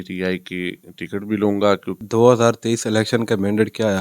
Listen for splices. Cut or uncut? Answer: cut